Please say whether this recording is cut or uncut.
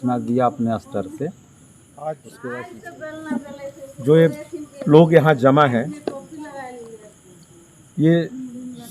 cut